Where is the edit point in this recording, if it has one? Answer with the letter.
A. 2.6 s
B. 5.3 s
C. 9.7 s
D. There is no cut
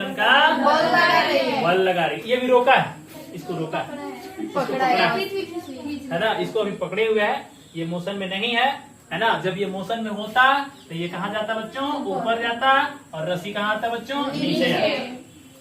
D